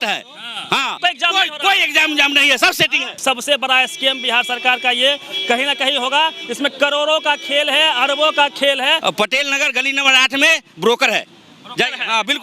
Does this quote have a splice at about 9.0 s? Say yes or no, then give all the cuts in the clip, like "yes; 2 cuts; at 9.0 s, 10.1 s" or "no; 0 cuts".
yes; 3 cuts; at 1.0 s, 3.2 s, 9.0 s